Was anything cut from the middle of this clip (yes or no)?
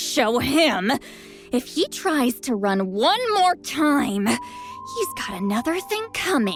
no